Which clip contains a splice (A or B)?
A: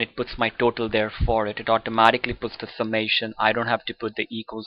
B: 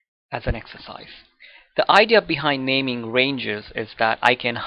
A